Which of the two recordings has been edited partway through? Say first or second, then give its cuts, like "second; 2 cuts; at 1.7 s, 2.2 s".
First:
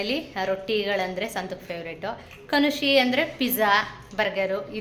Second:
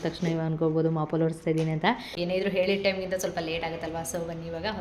second; 1 cut; at 2.1 s